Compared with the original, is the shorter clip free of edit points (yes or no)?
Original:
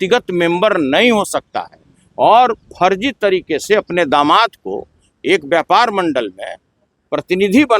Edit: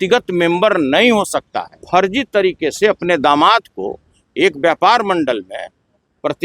no